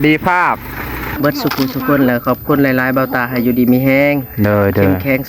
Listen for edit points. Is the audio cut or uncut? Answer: cut